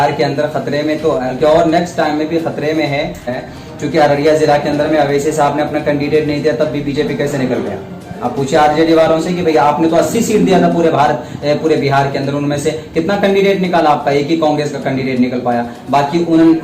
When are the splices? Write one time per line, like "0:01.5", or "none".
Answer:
0:01.3
0:03.4